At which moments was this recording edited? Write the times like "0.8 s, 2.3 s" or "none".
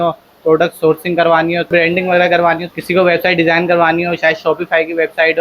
1.7 s, 2.8 s